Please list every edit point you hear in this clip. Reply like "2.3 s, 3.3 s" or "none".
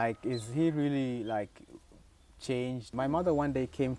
2.8 s